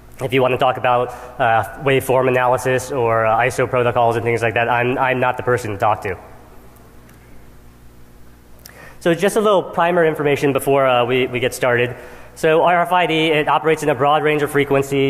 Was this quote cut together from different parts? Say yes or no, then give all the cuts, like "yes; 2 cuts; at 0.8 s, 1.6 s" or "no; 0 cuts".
no; 0 cuts